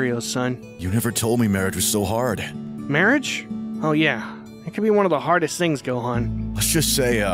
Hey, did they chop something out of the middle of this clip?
no; 0 cuts

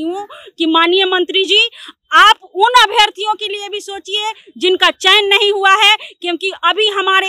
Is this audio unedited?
yes; 0 cuts

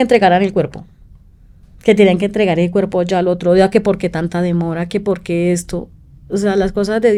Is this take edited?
no; 0 cuts

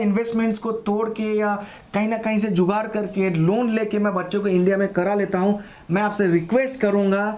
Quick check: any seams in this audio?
no; 0 cuts

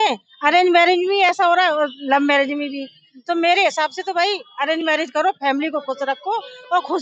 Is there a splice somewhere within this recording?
no; 0 cuts

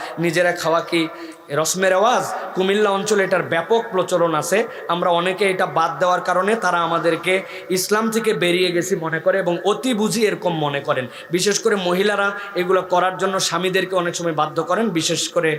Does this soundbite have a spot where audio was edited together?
no; 0 cuts

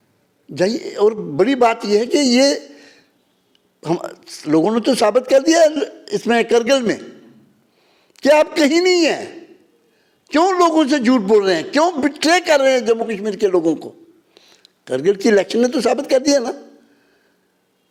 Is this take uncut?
yes; 0 cuts

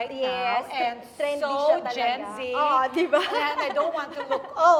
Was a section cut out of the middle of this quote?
no; 0 cuts

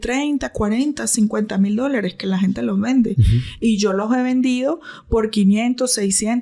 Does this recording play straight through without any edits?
yes; 0 cuts

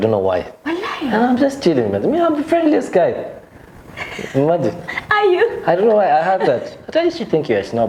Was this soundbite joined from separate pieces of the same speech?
no; 0 cuts

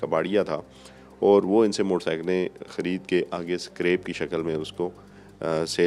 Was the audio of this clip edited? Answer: no; 0 cuts

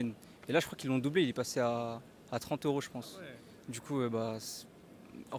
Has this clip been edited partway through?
no; 0 cuts

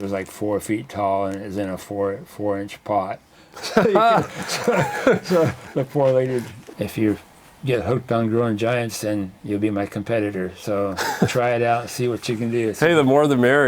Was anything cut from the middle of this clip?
yes; 1 cut; at 6.6 s

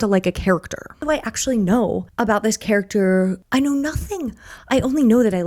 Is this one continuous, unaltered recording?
no; 3 cuts; at 1.0 s, 2.1 s, 3.4 s

